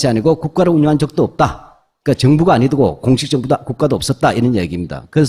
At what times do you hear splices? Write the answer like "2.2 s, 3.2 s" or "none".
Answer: 2.7 s